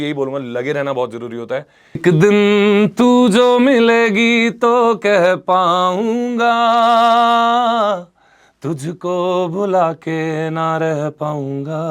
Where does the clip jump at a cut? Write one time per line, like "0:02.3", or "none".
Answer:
0:02.0

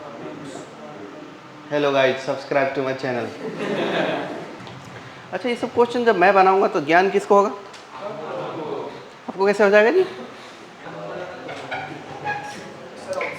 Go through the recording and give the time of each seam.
0:04.5
0:10.8

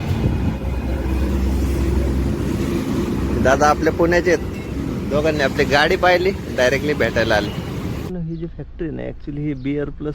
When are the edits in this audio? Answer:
0:08.1

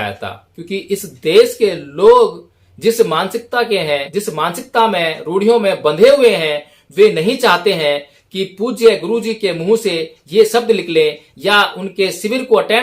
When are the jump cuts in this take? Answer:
0:04.1

